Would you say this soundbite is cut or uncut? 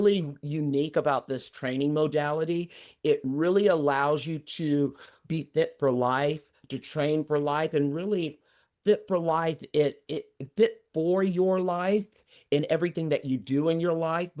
uncut